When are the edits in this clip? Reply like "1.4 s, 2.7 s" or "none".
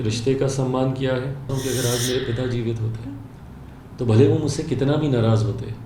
1.5 s